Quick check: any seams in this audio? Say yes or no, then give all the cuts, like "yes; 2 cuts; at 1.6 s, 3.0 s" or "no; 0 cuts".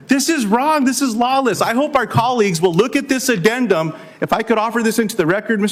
no; 0 cuts